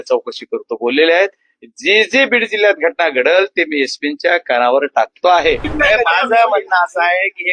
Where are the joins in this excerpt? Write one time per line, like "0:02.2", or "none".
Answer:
0:05.7